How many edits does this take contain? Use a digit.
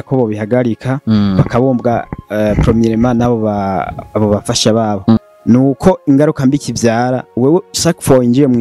1